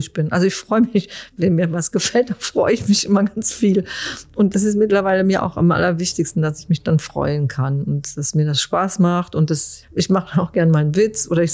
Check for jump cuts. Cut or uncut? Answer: cut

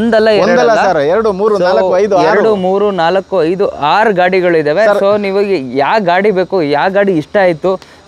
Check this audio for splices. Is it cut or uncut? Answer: uncut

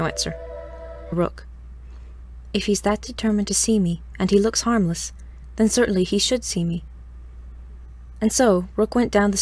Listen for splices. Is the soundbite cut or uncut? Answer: uncut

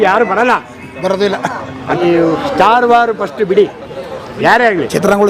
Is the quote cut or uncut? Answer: cut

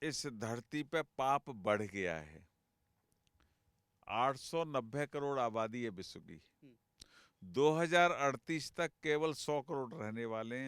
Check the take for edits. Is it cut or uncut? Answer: uncut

